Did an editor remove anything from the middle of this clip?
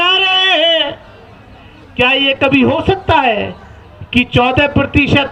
no; 0 cuts

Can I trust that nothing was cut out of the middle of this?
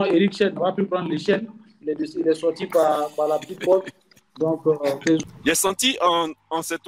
no; 1 cut; at 5.2 s

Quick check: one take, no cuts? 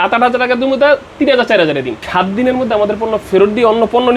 no; 1 cut; at 1.9 s

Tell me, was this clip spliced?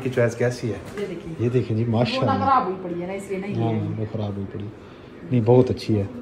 no; 0 cuts

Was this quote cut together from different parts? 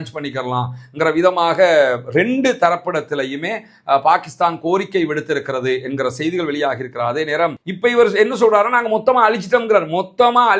yes; 1 cut; at 7.6 s

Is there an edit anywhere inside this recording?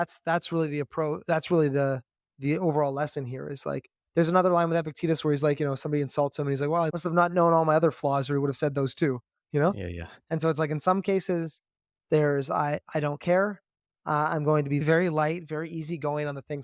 yes; 2 cuts; at 6.9 s, 14.8 s

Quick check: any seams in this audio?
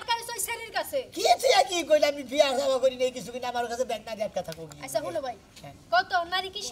no; 0 cuts

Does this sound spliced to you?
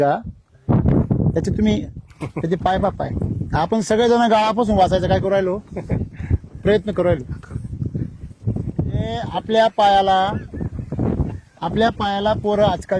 no; 0 cuts

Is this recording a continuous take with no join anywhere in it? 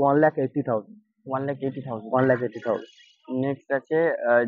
yes; 0 cuts

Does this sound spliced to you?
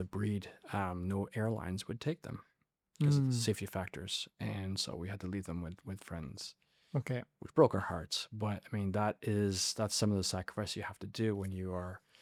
no; 0 cuts

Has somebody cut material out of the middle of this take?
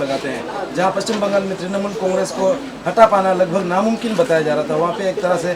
no; 0 cuts

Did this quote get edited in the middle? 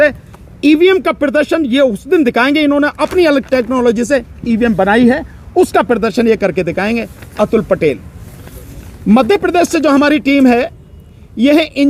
no; 0 cuts

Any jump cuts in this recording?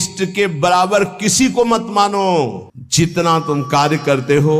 yes; 1 cut; at 2.6 s

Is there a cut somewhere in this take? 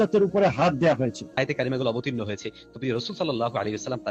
yes; 1 cut; at 1.4 s

